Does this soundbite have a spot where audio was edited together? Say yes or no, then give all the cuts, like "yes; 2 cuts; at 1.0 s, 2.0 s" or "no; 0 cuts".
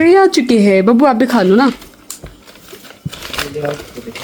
no; 0 cuts